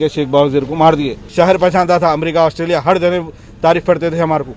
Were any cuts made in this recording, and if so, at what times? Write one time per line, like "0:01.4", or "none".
0:01.2